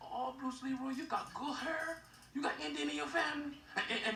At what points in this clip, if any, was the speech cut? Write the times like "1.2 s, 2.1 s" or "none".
none